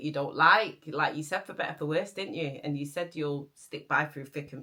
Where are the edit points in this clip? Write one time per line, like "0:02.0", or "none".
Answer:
none